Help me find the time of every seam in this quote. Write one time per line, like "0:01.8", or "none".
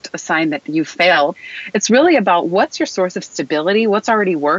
0:01.3